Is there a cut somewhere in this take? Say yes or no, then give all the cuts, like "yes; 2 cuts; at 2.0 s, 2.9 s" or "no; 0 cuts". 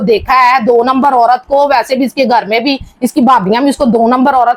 no; 0 cuts